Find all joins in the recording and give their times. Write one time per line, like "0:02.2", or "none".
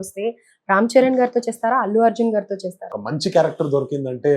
0:02.9